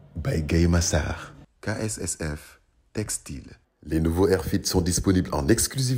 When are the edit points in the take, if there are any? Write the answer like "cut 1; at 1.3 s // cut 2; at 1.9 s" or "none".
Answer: cut 1; at 3.6 s